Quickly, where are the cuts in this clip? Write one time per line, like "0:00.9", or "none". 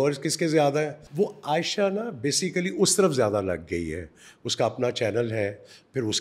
0:01.0